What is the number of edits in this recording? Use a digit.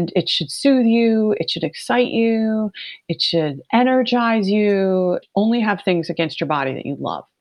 1